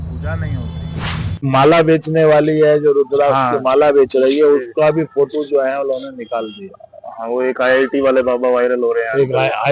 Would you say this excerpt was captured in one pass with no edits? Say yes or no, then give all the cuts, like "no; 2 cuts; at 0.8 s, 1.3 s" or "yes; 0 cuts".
no; 1 cut; at 1.4 s